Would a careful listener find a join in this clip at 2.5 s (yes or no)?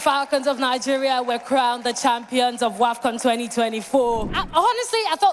no